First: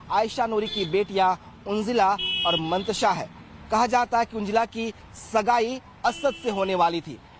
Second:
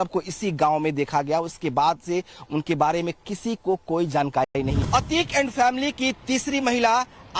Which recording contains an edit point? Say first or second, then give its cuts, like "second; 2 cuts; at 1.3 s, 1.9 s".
second; 1 cut; at 4.5 s